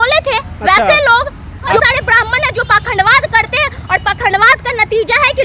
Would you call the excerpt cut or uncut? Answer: cut